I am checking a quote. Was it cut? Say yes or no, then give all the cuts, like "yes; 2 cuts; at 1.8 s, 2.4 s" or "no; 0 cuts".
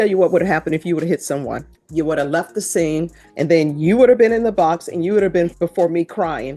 yes; 3 cuts; at 1.8 s, 3.2 s, 5.5 s